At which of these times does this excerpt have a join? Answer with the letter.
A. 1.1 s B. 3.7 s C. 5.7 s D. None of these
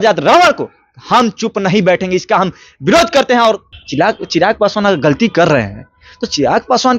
B